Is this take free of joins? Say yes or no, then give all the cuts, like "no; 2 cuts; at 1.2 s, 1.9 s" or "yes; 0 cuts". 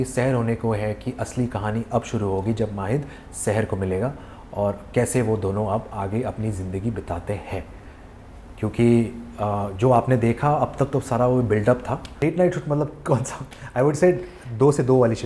no; 1 cut; at 12.1 s